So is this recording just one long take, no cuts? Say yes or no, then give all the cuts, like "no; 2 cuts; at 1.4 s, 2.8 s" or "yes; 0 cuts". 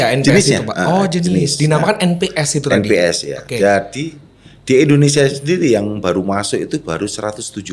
yes; 0 cuts